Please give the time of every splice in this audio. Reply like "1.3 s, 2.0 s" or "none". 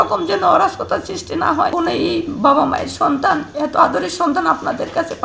1.7 s

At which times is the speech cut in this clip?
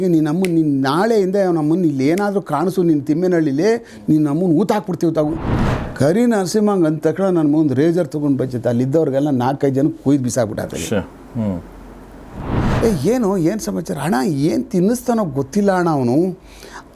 5.5 s, 12.6 s

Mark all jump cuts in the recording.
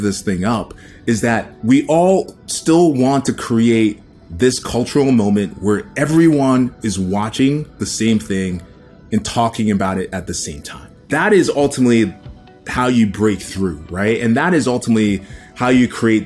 1.5 s, 10.9 s

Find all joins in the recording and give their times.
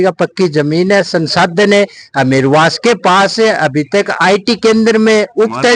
none

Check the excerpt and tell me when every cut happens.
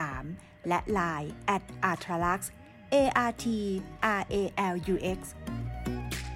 5.3 s

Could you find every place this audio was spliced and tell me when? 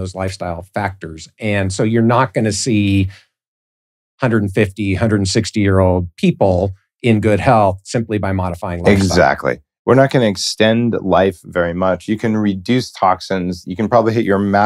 none

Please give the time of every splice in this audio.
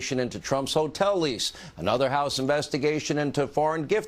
2.0 s

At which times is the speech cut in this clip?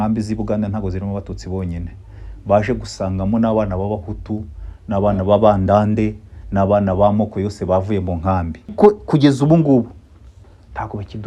8.7 s

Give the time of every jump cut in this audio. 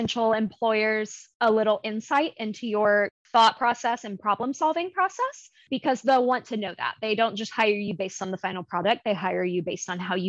3.2 s

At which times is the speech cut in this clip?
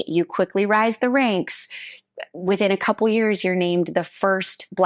none

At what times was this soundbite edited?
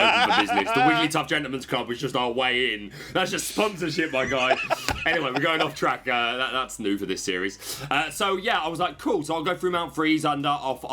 none

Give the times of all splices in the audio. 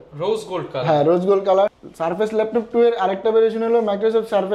1.8 s

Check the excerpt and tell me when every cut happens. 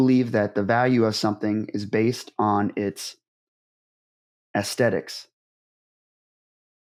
none

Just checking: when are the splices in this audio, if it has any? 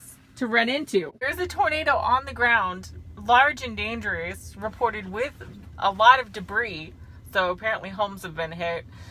1.3 s

